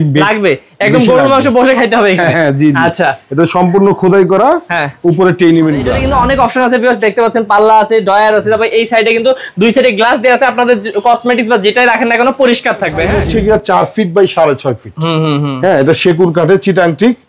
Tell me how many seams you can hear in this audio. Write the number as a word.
two